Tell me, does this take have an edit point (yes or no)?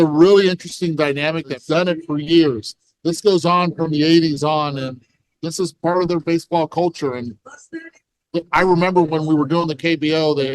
yes